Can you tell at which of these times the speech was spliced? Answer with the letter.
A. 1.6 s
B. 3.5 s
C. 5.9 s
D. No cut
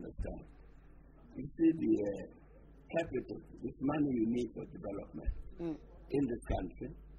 C